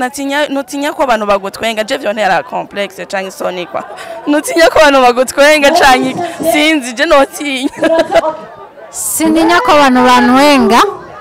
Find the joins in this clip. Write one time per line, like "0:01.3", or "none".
0:08.2